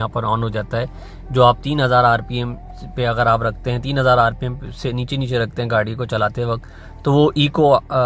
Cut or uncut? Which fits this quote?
uncut